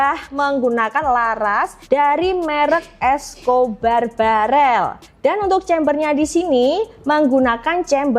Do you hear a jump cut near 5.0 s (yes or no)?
yes